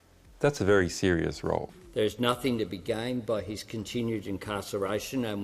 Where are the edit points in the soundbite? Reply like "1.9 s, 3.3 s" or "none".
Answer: 1.8 s

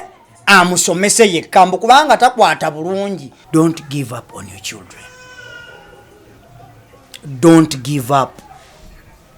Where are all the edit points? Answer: 3.3 s

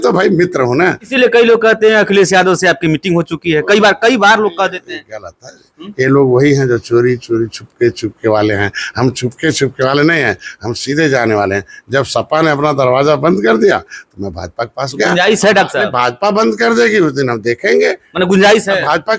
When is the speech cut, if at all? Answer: 1.1 s

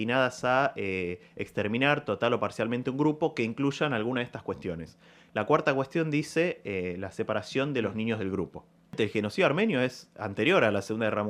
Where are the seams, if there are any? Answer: 9.0 s

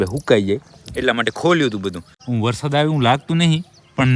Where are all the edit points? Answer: 2.1 s

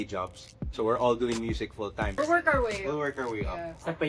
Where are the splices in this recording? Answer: 2.2 s

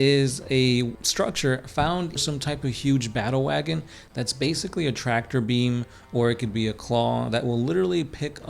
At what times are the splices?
1.0 s, 2.2 s

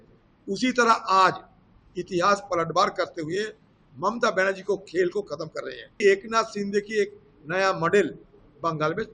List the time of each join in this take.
5.9 s

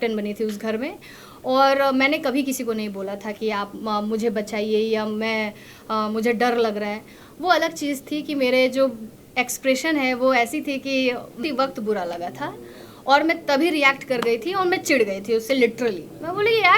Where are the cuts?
11.4 s

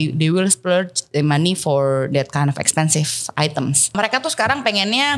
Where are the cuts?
3.9 s

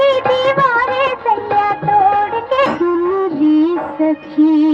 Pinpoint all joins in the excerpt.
2.7 s

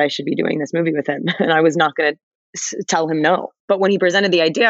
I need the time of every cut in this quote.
3.5 s

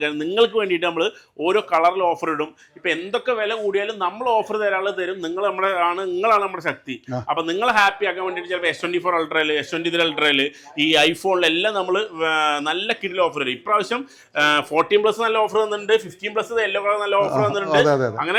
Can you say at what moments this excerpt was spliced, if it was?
none

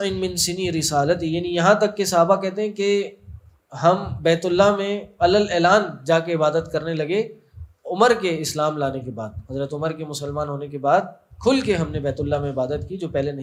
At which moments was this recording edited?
none

